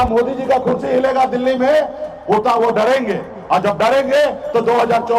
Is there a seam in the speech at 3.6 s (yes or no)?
no